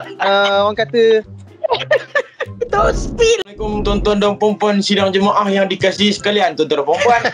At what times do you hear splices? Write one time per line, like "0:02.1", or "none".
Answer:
0:03.8